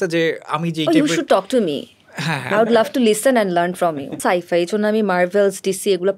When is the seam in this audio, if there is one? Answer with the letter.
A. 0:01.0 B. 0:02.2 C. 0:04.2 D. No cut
C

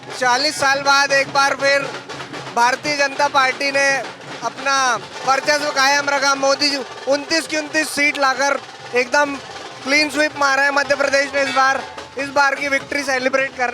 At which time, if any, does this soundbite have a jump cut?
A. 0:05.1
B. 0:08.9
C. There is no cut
A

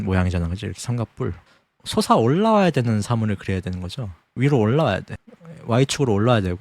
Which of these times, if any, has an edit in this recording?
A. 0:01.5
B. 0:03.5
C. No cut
A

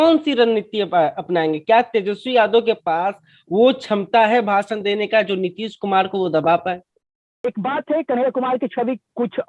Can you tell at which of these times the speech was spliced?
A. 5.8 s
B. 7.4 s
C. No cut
B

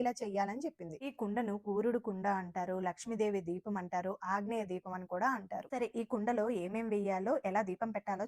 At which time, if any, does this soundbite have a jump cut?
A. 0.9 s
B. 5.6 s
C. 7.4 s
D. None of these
B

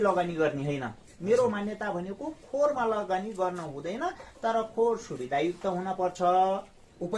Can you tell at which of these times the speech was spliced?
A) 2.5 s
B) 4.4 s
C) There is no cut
C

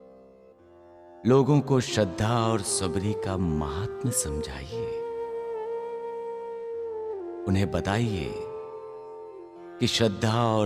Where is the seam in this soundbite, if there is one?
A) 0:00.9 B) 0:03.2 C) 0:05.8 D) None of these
A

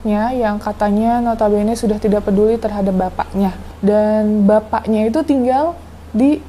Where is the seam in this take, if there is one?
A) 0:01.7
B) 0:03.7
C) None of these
B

